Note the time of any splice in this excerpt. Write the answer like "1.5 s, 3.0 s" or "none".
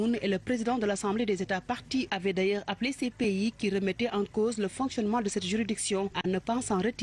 2.4 s